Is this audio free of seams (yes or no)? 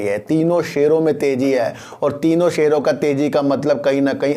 yes